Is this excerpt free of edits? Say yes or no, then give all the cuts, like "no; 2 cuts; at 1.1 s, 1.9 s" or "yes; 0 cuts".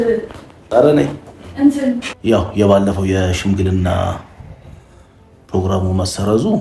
no; 1 cut; at 2.1 s